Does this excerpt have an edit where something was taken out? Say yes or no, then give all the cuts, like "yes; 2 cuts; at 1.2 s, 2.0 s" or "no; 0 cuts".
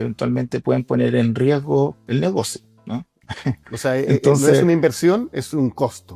no; 0 cuts